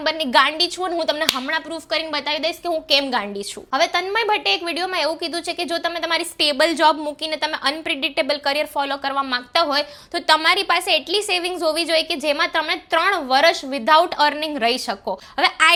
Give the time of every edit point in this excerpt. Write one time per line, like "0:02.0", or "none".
none